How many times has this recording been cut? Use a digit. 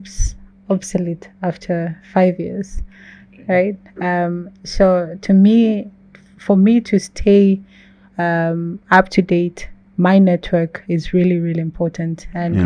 0